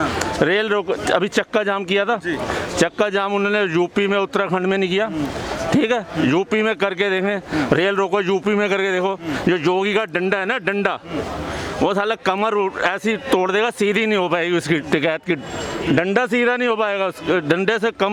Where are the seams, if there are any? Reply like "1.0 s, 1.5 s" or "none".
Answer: none